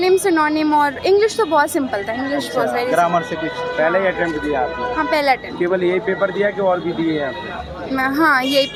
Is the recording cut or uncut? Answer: uncut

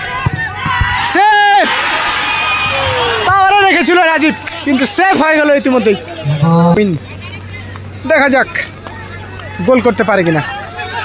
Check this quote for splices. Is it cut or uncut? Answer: cut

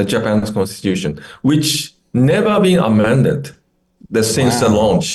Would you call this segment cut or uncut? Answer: uncut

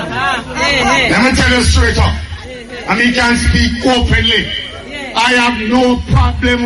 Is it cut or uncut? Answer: uncut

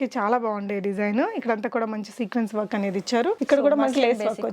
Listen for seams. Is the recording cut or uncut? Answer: cut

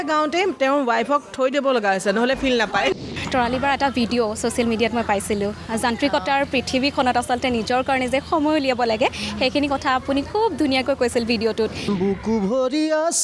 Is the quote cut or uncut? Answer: cut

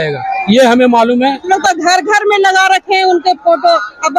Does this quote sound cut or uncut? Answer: cut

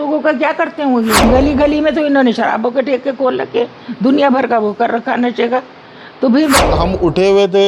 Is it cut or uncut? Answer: cut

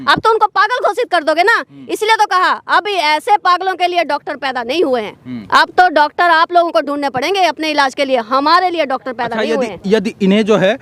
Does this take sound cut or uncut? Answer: uncut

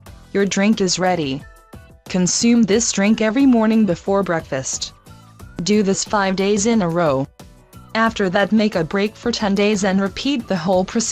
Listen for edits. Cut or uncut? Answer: cut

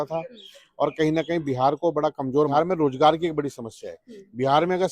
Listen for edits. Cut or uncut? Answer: cut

